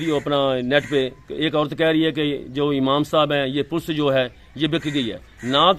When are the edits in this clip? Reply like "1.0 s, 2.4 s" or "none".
none